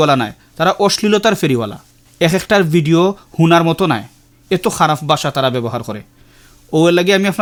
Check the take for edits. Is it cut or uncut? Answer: uncut